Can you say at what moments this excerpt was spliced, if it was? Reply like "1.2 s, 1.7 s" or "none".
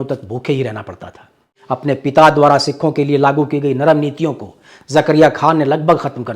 1.6 s